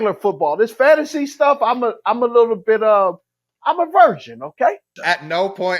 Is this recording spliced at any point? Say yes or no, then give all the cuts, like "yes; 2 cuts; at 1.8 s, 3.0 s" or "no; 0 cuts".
yes; 1 cut; at 4.9 s